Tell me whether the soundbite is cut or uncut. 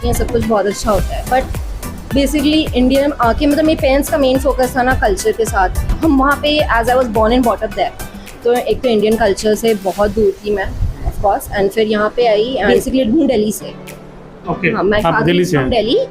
cut